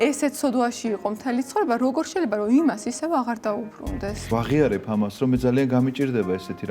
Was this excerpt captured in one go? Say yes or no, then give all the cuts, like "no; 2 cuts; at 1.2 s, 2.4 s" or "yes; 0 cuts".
no; 1 cut; at 4.3 s